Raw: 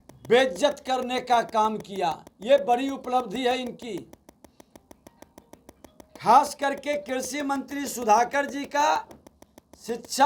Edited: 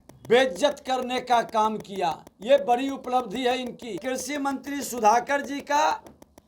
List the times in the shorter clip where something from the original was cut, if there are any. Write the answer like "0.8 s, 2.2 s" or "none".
4.0 s